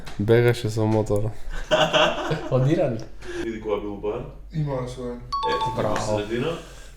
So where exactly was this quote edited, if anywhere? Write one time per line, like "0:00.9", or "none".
0:03.4